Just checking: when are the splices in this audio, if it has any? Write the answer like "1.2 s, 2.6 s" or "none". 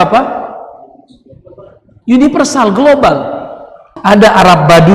3.9 s